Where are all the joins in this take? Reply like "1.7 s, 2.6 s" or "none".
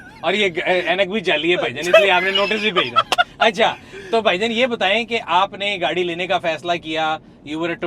none

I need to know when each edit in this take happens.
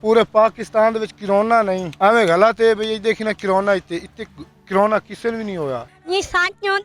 1.9 s, 5.9 s

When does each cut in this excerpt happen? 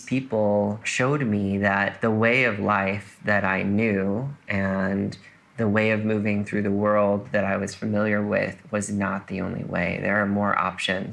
0.9 s, 1.9 s

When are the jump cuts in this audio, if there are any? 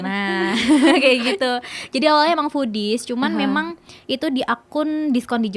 none

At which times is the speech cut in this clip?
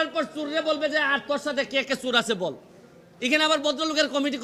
none

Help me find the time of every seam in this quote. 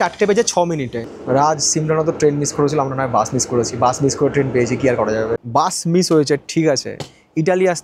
1.1 s, 5.4 s

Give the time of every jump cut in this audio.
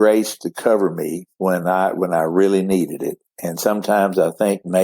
1.2 s

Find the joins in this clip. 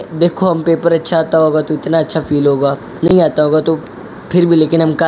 none

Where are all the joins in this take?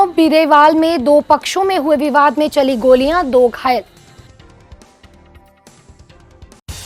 none

